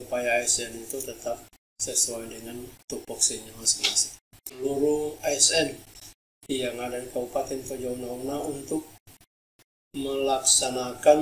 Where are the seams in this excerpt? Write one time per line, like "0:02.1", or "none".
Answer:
0:04.6